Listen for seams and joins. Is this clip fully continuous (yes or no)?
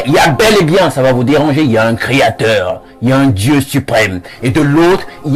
yes